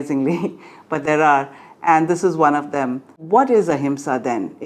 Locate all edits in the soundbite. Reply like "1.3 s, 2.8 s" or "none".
3.1 s